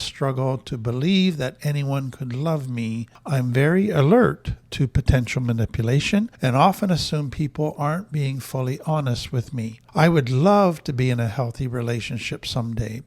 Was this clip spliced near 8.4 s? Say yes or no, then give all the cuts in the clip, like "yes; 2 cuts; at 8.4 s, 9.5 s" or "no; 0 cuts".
no; 3 cuts; at 3.1 s, 6.3 s, 9.8 s